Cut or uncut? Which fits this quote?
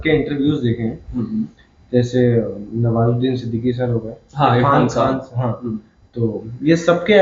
uncut